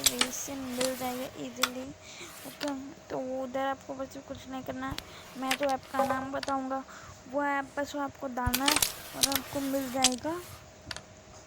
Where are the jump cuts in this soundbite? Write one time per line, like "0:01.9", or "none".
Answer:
none